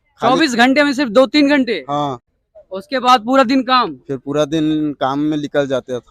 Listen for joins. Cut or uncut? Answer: uncut